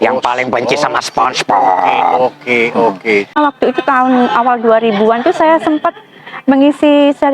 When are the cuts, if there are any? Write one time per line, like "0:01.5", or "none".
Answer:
0:03.4